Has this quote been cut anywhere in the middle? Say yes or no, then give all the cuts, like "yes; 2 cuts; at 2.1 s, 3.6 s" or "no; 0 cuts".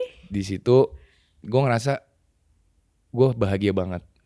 no; 0 cuts